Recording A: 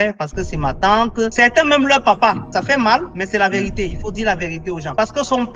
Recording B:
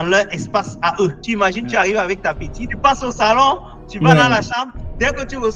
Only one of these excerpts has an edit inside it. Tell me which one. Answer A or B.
B